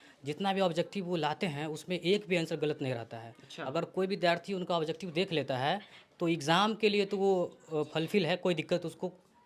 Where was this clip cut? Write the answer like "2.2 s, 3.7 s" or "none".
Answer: none